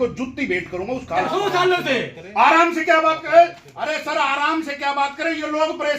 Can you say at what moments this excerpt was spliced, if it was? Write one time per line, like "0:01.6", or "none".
0:01.2